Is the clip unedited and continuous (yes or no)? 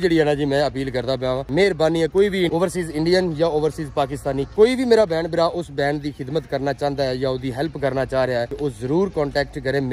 yes